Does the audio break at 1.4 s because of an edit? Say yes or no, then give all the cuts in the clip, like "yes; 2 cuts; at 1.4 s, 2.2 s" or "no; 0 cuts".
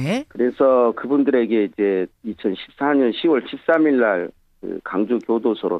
no; 1 cut; at 4.1 s